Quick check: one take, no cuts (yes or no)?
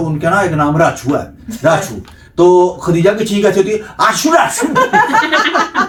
yes